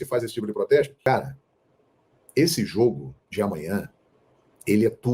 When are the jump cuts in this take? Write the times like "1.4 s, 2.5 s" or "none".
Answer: 1.1 s